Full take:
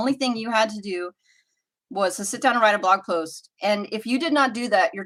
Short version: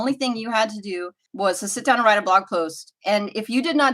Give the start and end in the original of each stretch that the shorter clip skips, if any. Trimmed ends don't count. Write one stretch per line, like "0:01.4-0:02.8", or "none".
0:01.2-0:01.7